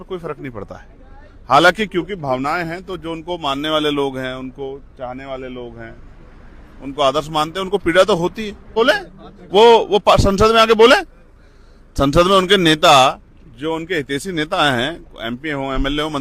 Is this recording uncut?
no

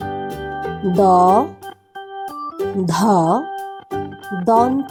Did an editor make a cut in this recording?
no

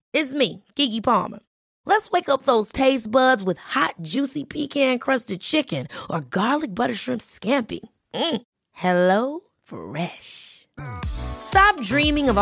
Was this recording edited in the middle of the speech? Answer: no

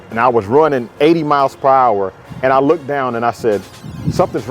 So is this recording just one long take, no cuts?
yes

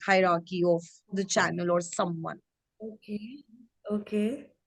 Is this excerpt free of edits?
yes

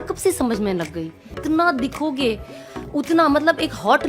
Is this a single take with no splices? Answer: no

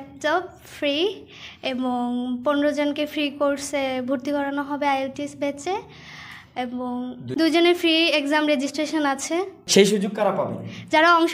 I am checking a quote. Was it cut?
no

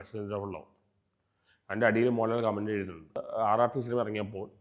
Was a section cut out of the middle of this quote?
yes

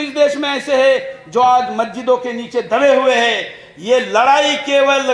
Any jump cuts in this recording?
no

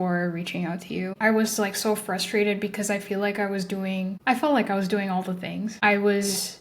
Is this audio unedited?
no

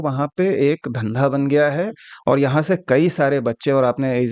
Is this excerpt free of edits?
yes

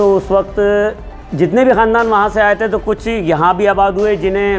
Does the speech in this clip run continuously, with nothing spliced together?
yes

